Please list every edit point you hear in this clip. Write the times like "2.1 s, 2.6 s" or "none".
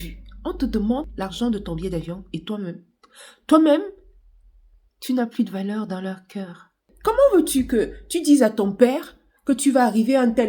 1.1 s, 6.9 s